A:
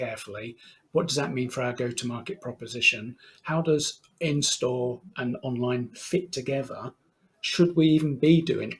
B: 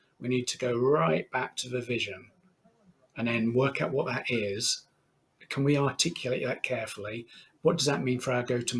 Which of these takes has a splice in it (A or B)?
B